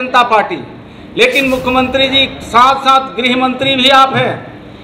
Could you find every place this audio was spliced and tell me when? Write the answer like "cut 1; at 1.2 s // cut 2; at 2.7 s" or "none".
none